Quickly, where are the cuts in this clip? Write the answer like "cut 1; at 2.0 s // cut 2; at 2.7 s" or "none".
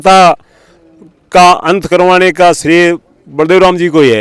none